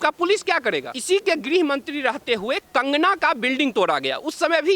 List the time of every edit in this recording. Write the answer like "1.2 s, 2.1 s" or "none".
0.9 s